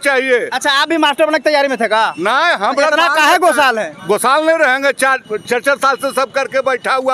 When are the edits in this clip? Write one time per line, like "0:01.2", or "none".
none